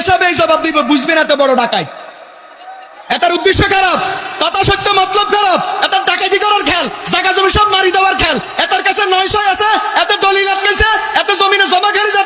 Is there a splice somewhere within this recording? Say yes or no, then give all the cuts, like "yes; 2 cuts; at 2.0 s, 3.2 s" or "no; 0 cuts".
no; 0 cuts